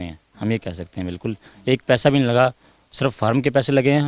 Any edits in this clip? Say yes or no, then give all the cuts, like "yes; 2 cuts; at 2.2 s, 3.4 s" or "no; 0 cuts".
no; 0 cuts